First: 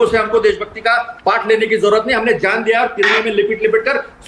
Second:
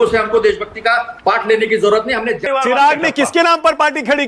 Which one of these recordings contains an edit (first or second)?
second